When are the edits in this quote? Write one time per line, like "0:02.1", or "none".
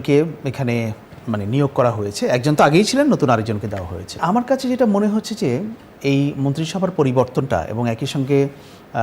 0:04.2